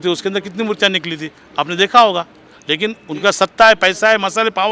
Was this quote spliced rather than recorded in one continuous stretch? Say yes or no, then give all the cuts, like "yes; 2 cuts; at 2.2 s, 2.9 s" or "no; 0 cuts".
no; 0 cuts